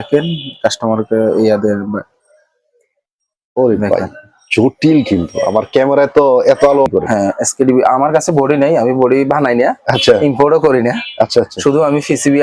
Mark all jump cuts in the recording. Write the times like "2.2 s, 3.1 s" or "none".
6.9 s